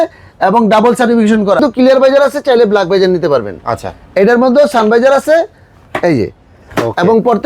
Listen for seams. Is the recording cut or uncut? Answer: cut